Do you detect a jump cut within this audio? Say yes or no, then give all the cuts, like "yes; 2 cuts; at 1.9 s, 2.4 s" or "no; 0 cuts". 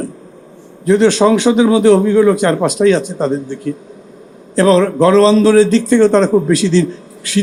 no; 0 cuts